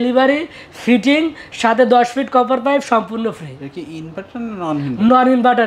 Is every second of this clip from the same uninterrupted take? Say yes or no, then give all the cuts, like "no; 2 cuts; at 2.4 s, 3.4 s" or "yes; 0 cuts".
yes; 0 cuts